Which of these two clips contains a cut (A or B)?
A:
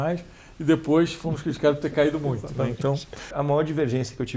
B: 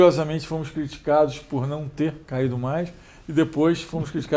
A